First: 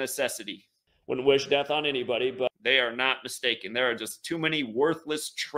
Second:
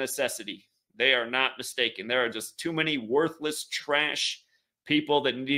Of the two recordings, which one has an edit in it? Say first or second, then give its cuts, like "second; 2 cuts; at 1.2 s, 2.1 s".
second; 1 cut; at 0.9 s